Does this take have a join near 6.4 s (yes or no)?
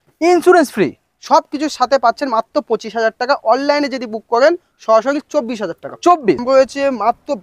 yes